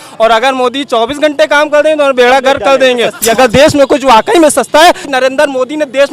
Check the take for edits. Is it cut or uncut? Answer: cut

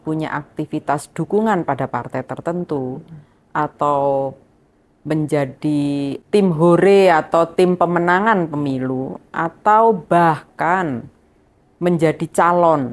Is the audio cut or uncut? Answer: cut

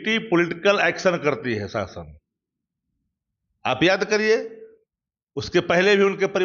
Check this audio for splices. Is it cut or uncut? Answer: uncut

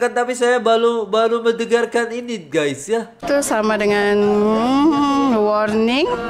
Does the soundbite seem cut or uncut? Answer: cut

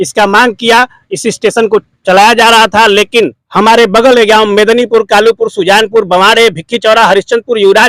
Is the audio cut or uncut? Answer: cut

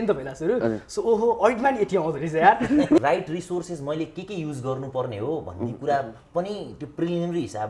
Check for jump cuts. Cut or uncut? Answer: cut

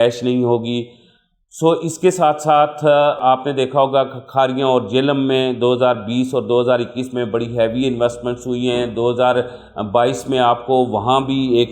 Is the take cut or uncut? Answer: uncut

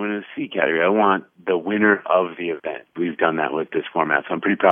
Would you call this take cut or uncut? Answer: cut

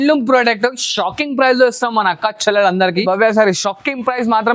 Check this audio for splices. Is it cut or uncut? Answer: cut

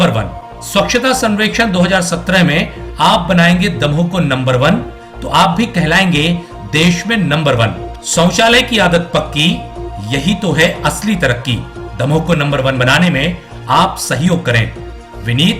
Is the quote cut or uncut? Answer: uncut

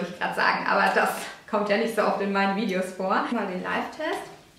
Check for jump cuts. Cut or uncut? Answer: cut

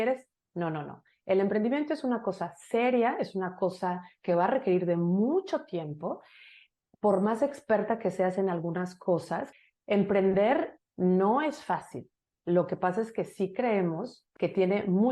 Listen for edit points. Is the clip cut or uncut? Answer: cut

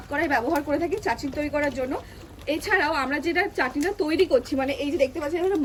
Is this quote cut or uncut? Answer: uncut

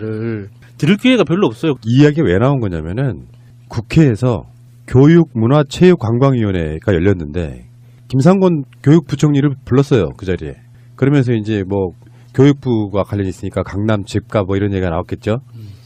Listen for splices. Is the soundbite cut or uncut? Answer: uncut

